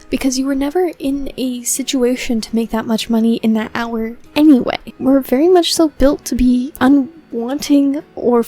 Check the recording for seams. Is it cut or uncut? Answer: cut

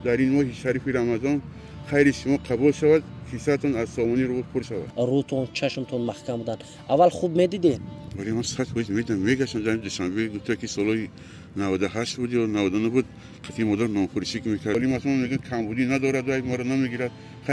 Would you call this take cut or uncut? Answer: cut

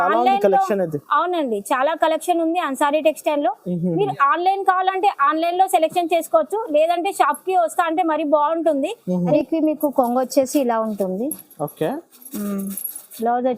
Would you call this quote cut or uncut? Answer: cut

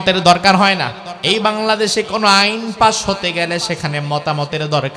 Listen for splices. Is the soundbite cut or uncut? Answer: cut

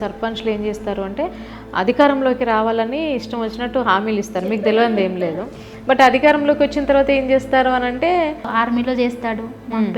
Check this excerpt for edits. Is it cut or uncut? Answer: cut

